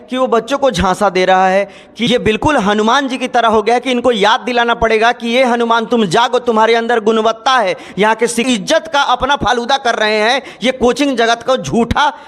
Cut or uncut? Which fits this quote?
cut